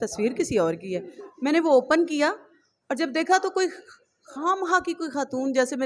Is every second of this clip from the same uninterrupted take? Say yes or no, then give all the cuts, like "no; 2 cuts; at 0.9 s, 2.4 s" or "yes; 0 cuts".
yes; 0 cuts